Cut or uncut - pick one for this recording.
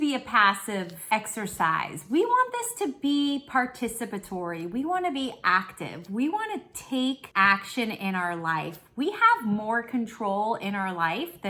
cut